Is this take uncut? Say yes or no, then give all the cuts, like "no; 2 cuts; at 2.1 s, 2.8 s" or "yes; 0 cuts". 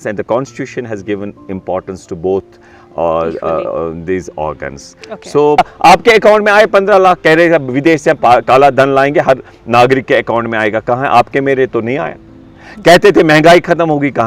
no; 1 cut; at 5.6 s